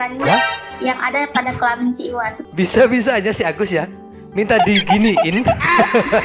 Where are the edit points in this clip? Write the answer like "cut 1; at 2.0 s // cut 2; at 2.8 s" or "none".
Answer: cut 1; at 2.4 s